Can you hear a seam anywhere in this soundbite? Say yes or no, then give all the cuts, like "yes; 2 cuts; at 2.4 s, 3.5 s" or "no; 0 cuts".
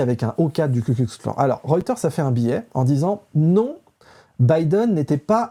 no; 0 cuts